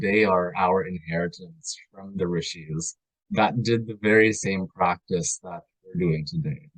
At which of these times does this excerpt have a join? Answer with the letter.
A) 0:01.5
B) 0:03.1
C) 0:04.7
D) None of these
D